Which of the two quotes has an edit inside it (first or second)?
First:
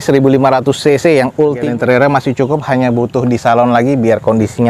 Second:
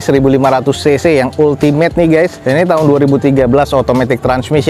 first